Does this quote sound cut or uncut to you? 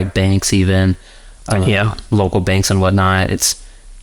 uncut